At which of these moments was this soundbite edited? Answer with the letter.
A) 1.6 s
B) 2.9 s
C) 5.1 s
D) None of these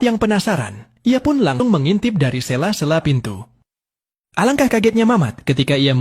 A